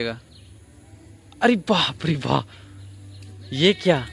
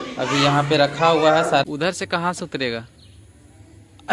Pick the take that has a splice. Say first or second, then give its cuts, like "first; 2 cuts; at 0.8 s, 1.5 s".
second; 1 cut; at 1.6 s